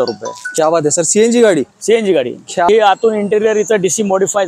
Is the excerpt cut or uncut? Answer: cut